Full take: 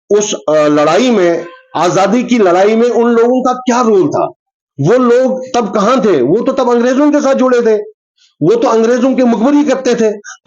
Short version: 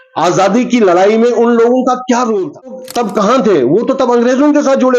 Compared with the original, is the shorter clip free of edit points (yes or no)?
no